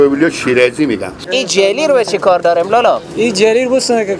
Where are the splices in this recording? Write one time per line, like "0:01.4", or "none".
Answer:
0:01.2